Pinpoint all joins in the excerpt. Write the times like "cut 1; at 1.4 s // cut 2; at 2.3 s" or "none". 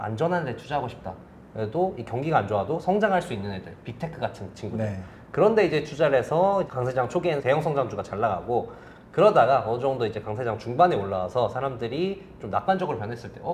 none